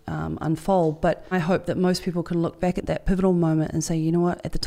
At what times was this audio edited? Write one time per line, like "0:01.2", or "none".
0:01.3
0:02.8